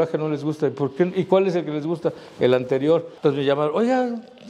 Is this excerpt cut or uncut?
cut